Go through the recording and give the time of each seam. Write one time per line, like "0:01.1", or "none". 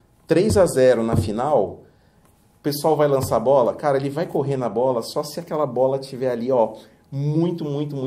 none